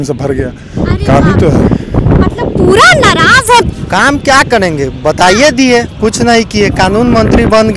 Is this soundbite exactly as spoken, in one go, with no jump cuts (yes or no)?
no